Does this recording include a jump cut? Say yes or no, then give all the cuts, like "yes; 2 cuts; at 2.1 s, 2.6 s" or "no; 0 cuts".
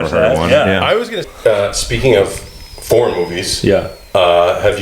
yes; 1 cut; at 1.3 s